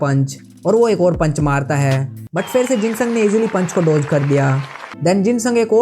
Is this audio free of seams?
no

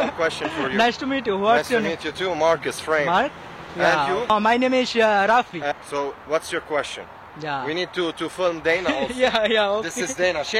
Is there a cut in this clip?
no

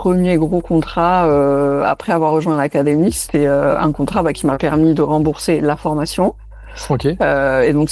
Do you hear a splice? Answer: no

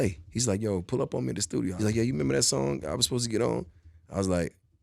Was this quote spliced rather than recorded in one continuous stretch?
yes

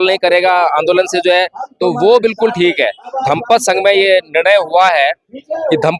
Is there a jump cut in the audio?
yes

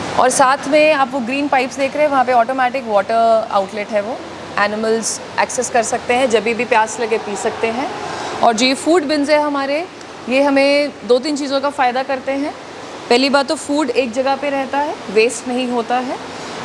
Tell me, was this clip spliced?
no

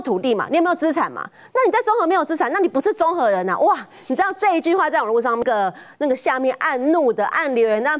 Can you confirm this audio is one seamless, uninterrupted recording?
no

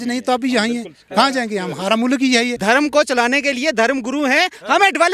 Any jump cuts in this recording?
yes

